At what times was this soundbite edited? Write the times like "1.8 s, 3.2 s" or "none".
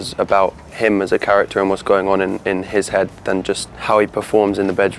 3.7 s